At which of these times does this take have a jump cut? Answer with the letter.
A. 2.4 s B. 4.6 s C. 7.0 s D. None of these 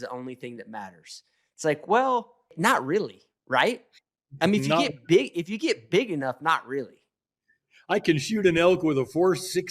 A